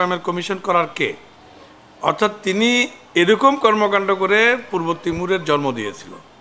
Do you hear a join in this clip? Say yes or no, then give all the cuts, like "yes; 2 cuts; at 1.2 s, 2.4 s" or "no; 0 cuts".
no; 0 cuts